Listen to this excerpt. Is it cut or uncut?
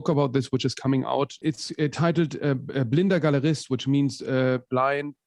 cut